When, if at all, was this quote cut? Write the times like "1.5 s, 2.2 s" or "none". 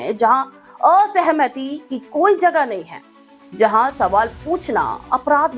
none